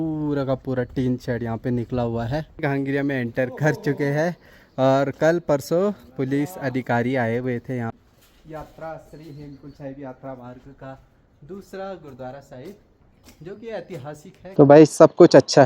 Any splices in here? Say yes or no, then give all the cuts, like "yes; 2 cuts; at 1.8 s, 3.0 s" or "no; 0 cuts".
yes; 3 cuts; at 2.6 s, 7.9 s, 14.5 s